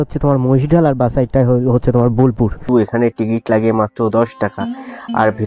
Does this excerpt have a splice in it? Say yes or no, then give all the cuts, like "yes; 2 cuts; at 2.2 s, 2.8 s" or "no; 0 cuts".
yes; 1 cut; at 2.6 s